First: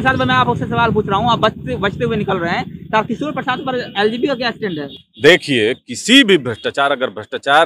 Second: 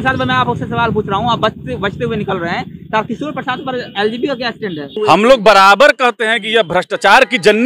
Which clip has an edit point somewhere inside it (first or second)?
second